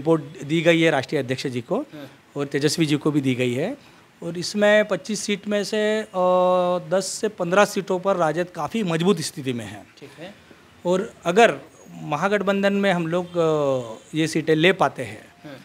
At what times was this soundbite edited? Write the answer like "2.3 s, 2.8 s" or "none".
none